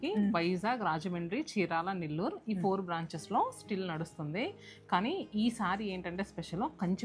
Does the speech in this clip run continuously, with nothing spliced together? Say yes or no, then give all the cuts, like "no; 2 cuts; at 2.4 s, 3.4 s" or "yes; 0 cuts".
yes; 0 cuts